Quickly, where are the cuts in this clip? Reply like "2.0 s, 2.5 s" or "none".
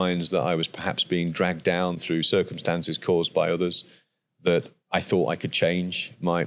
none